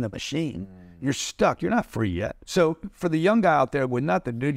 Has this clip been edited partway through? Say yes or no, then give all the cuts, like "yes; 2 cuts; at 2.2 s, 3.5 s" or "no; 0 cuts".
yes; 1 cut; at 2.4 s